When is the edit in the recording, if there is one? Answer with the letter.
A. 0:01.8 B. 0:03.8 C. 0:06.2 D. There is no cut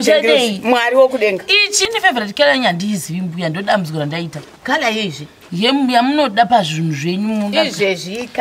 A